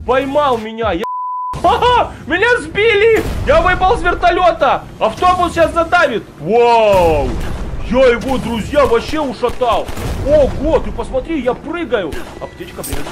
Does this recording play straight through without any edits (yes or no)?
no